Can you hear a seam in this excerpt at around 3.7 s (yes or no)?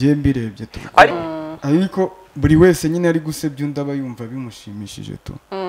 no